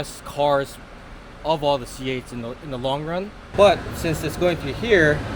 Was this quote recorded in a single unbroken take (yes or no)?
no